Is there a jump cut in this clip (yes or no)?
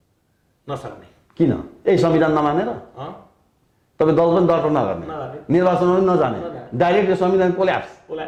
no